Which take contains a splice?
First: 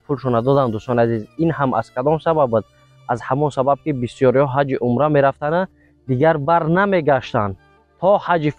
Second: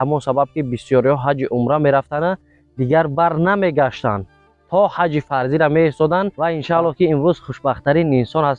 second; 1 cut; at 6.3 s

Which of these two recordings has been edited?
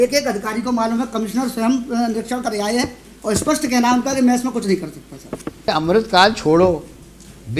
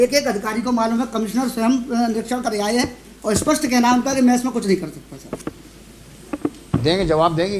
first; 1 cut; at 5.7 s

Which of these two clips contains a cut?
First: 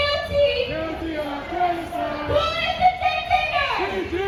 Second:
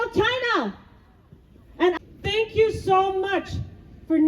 second; 1 cut; at 2.0 s

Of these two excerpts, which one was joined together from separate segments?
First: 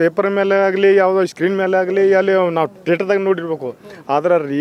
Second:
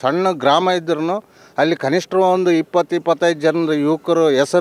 first; 1 cut; at 2.8 s

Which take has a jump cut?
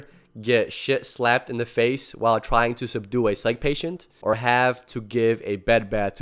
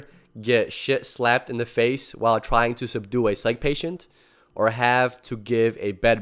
first; 1 cut; at 4.4 s

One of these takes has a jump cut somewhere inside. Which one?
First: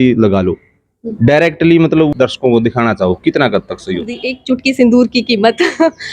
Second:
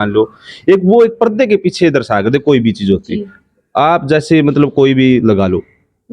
first; 2 cuts; at 2.1 s, 4.3 s

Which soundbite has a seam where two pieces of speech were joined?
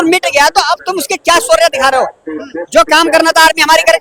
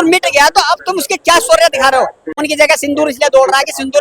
second; 1 cut; at 2.4 s

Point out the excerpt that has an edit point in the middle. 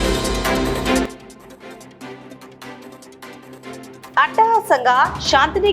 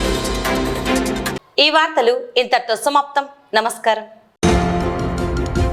first; 2 cuts; at 1.1 s, 4.1 s

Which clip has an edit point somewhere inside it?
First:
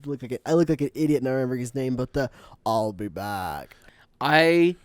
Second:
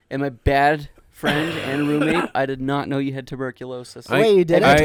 first; 1 cut; at 3.7 s

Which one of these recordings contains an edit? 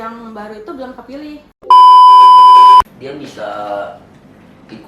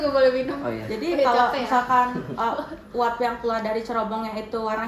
first; 2 cuts; at 1.6 s, 2.9 s

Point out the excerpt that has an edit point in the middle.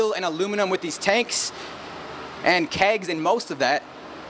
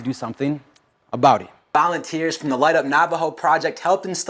second; 1 cut; at 1.7 s

